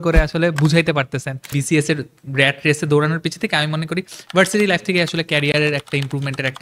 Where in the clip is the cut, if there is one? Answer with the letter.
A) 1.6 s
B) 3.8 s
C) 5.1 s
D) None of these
A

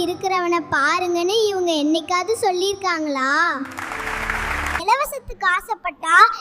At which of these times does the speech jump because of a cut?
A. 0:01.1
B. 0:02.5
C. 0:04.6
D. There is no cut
C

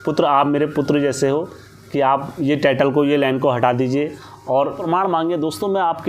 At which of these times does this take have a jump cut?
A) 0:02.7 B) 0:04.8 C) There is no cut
B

